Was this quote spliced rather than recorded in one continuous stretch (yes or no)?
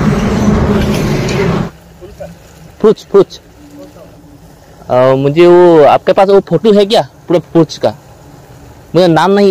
yes